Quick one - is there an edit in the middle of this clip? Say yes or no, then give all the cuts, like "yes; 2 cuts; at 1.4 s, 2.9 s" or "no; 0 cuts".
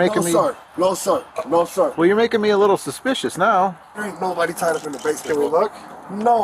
yes; 1 cut; at 3.9 s